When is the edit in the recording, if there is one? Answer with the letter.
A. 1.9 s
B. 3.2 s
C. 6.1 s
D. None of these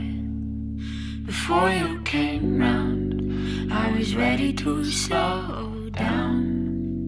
A